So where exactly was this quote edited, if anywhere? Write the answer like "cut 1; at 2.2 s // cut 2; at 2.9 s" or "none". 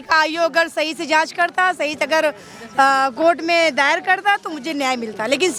none